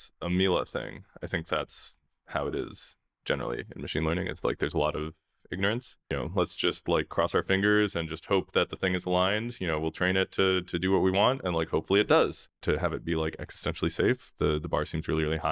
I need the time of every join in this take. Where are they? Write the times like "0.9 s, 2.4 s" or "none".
6.0 s, 12.6 s